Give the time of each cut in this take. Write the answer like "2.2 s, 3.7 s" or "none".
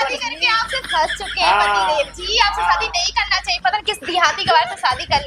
none